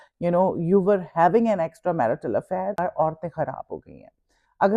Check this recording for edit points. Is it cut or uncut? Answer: cut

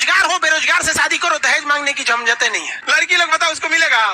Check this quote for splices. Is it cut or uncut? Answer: cut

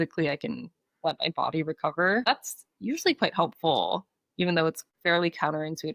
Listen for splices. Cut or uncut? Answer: cut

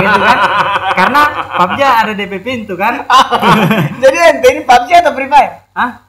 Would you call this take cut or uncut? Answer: uncut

